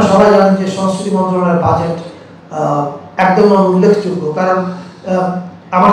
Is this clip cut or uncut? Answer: uncut